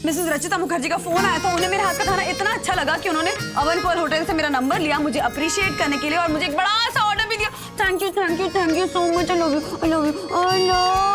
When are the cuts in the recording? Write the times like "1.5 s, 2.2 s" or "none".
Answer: none